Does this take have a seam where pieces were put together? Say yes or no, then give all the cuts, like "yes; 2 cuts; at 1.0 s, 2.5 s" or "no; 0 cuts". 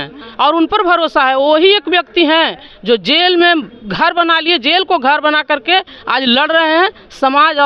no; 0 cuts